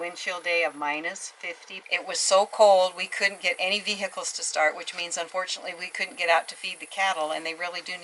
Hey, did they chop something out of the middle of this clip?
no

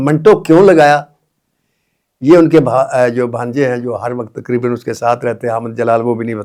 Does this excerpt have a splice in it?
no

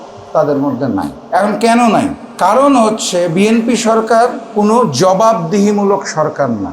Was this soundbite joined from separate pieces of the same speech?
yes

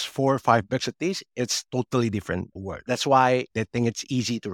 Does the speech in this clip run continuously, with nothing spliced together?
no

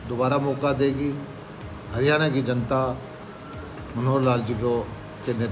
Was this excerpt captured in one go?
yes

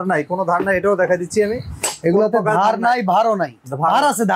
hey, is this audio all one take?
yes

